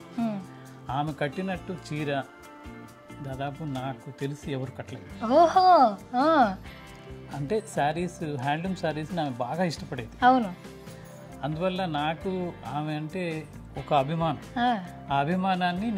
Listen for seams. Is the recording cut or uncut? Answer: uncut